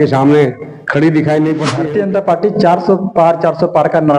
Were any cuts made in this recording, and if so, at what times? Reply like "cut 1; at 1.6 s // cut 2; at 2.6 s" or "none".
cut 1; at 1.7 s